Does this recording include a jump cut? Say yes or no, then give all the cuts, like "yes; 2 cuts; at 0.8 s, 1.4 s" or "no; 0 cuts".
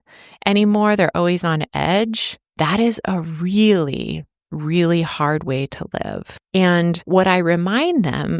yes; 2 cuts; at 6.3 s, 7.0 s